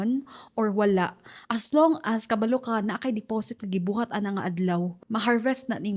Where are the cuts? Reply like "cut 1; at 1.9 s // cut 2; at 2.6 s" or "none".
cut 1; at 5.0 s

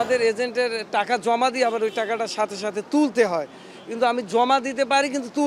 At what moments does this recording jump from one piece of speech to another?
none

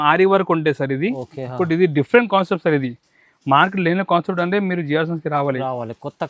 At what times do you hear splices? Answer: none

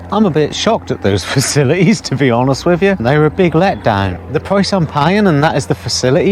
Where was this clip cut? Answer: cut 1; at 3.0 s // cut 2; at 4.2 s

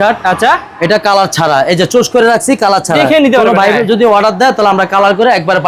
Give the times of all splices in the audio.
none

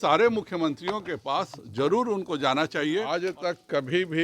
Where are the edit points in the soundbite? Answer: cut 1; at 3.1 s

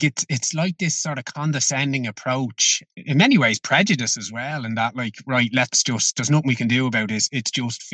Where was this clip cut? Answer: cut 1; at 2.9 s

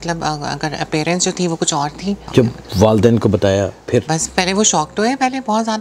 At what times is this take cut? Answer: cut 1; at 2.2 s // cut 2; at 4.1 s

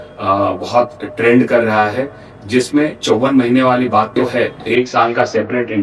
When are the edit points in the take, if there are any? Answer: cut 1; at 4.6 s

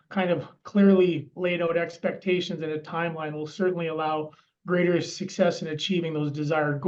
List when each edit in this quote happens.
none

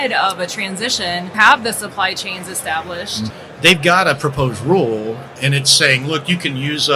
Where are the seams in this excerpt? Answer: cut 1; at 1.3 s // cut 2; at 3.4 s

